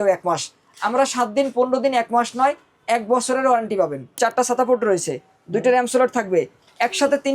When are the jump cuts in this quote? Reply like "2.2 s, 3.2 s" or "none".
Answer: 4.1 s